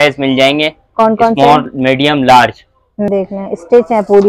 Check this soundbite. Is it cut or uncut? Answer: cut